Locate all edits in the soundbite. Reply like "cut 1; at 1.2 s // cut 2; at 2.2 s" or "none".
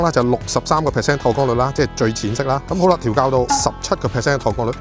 none